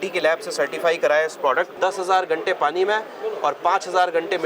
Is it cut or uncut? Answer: cut